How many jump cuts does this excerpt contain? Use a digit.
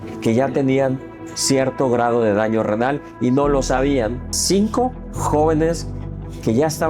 1